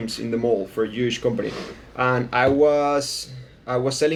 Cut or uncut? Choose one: uncut